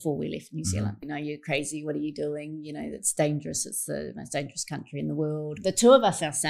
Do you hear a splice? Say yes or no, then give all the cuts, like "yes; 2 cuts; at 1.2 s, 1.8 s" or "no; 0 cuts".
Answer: yes; 2 cuts; at 1.0 s, 5.5 s